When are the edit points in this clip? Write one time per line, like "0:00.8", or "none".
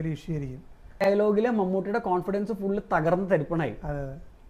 0:01.0